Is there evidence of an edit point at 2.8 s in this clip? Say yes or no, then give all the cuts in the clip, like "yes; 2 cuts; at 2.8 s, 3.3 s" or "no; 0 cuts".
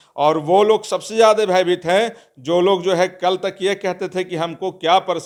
no; 0 cuts